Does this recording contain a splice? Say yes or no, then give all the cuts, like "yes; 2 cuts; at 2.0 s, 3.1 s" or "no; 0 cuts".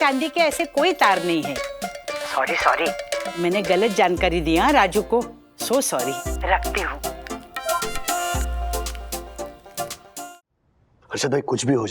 yes; 1 cut; at 10.3 s